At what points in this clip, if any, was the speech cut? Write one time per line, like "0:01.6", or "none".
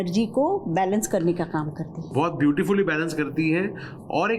none

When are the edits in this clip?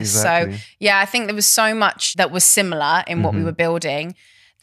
0:02.0

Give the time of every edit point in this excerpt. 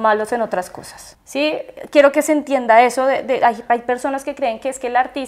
none

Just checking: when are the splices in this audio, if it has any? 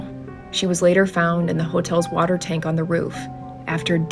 none

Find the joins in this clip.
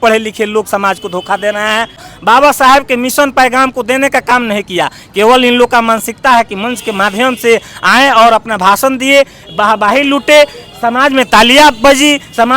0:02.0

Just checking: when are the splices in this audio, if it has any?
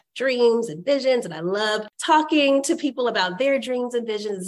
0:01.9

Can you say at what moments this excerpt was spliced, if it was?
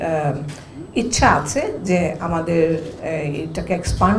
none

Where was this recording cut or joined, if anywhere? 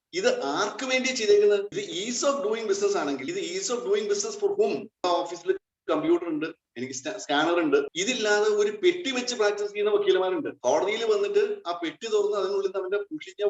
0:01.8
0:03.3
0:05.0
0:08.0
0:10.5

